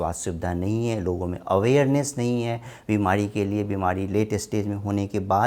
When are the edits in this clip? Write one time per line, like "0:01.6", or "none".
none